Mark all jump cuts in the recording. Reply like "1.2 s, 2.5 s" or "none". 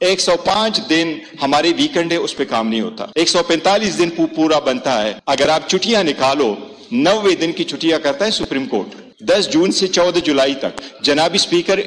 none

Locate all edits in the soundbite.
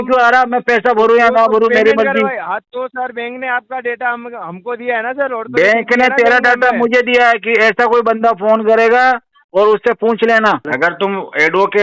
10.7 s

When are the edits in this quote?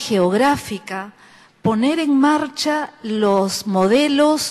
2.7 s

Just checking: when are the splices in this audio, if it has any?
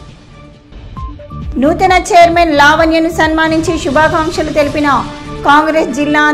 1.4 s

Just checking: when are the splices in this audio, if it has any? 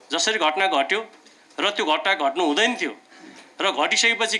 none

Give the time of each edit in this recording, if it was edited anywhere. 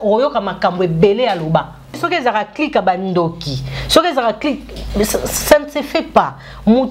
1.9 s

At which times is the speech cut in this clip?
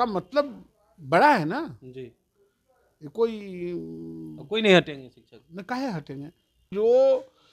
6.6 s

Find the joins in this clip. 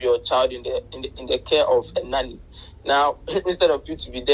none

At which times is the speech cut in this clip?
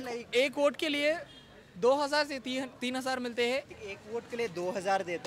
3.7 s

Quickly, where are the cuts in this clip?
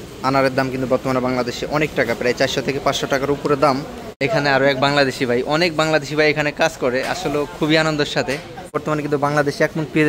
4.0 s, 8.8 s

